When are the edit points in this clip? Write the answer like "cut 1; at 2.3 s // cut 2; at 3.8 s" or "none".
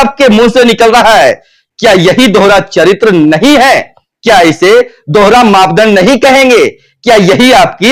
none